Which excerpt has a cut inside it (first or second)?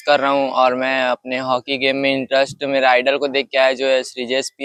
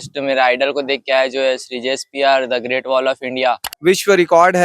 second